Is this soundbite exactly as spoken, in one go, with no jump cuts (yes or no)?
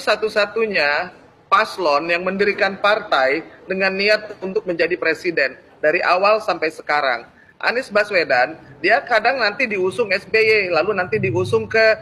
yes